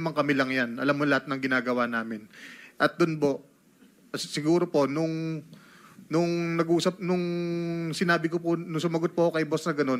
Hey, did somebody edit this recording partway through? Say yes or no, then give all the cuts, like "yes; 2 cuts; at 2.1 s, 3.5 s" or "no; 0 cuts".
no; 0 cuts